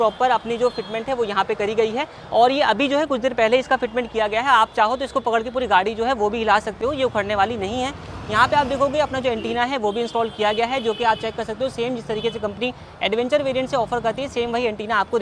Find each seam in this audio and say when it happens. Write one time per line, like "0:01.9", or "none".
none